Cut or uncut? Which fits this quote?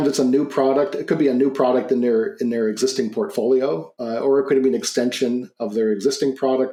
uncut